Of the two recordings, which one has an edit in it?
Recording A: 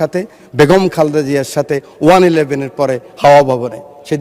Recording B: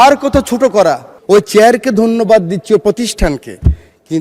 B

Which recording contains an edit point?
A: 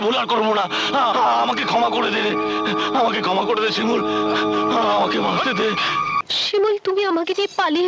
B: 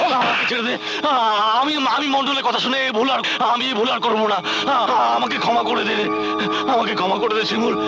A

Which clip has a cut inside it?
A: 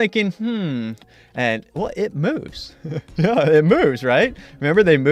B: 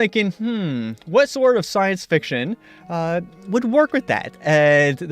B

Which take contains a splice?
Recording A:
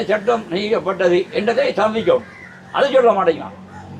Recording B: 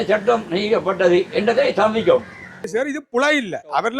B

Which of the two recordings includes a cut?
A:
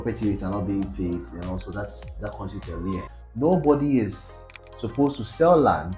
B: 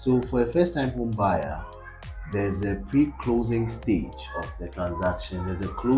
A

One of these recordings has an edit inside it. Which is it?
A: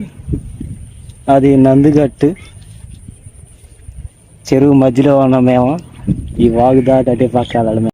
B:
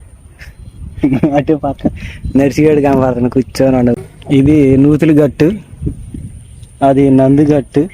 B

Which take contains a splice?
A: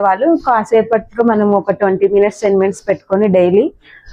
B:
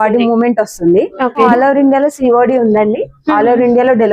B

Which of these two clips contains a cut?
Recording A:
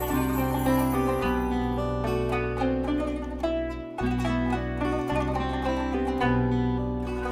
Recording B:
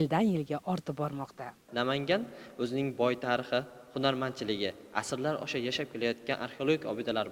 B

